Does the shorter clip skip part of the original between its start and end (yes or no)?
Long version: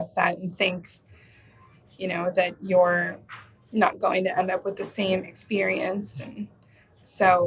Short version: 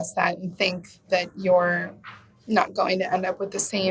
yes